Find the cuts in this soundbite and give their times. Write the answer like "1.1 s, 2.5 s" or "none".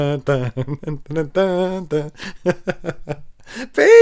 none